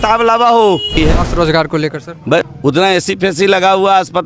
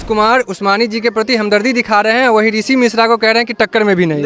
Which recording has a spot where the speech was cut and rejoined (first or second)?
first